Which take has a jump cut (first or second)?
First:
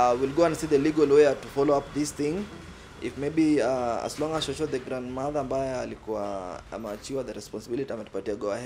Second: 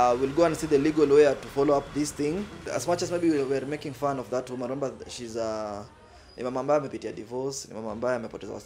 second